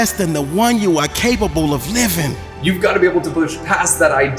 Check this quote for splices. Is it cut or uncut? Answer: cut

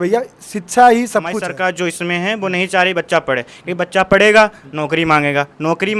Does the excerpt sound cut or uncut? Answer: cut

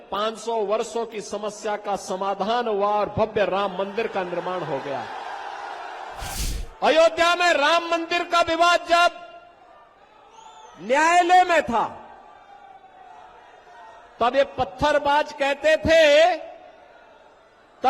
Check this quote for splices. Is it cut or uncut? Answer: cut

